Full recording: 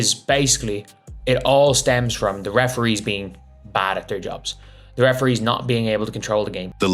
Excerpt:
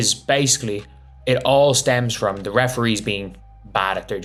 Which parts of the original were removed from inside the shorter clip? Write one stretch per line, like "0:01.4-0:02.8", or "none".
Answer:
none